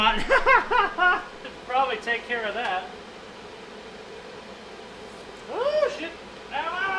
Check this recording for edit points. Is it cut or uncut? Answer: uncut